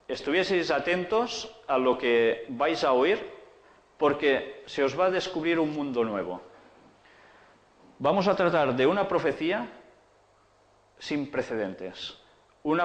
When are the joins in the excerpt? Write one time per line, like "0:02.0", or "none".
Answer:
0:01.3